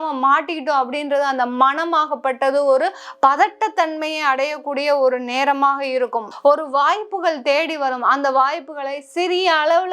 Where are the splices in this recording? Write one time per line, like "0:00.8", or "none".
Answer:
0:06.3